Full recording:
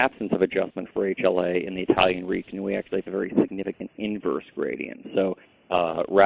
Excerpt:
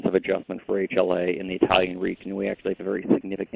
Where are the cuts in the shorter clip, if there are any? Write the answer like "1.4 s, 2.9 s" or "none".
none